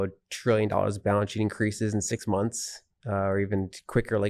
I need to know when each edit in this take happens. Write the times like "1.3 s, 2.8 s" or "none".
none